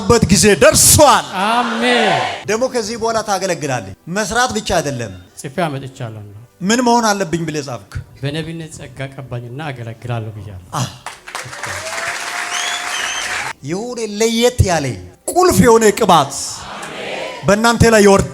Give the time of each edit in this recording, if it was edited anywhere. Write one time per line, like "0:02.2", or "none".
0:02.4
0:06.3
0:08.1
0:13.4